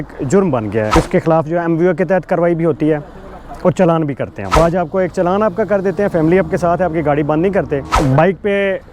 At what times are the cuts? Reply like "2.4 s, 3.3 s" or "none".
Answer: 1.0 s, 4.6 s, 7.9 s